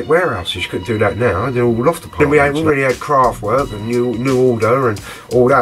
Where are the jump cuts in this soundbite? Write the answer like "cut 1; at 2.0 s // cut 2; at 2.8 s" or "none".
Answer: cut 1; at 2.2 s